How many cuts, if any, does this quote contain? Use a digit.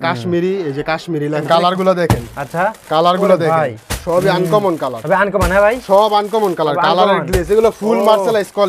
1